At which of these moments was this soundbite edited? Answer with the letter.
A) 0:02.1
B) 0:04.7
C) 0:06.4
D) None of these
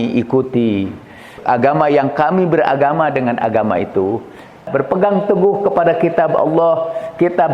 B